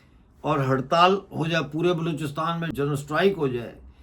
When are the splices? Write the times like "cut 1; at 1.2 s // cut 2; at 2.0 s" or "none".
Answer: cut 1; at 2.7 s